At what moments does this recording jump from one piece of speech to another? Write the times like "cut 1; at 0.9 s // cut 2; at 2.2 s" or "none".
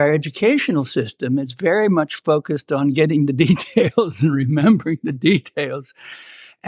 none